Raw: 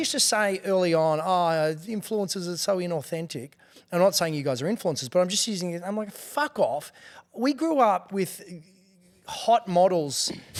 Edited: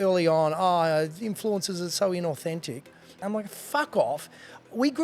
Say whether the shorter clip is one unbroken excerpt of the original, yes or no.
no